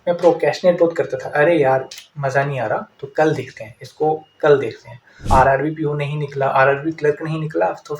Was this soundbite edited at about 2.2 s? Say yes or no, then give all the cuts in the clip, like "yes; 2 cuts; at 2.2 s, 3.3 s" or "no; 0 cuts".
no; 1 cut; at 5.2 s